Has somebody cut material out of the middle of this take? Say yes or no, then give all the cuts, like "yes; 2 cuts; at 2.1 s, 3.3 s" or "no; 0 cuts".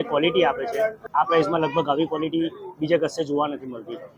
yes; 1 cut; at 1.0 s